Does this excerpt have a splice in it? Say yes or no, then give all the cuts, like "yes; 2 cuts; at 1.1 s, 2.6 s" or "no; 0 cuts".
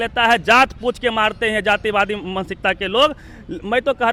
no; 0 cuts